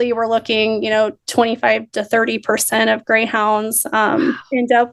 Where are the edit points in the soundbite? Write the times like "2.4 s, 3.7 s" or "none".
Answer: none

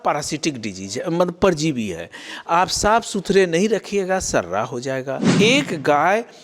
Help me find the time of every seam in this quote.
5.3 s

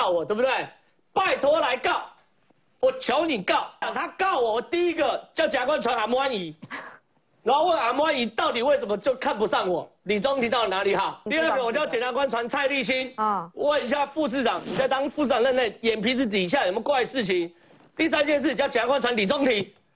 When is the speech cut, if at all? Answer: 3.8 s, 11.2 s

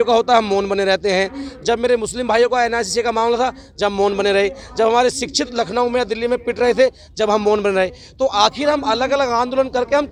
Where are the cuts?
none

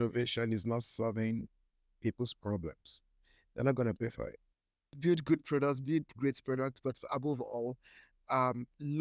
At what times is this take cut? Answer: 4.9 s

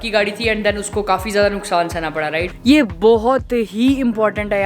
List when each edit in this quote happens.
2.5 s

